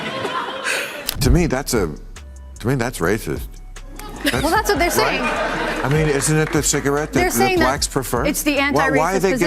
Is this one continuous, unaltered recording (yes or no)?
no